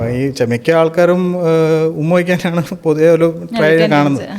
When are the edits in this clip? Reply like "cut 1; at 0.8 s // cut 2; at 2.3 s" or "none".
none